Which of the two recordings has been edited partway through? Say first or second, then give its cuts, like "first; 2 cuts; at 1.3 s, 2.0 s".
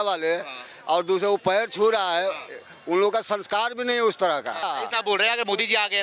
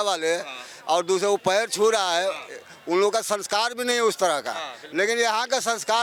first; 1 cut; at 4.7 s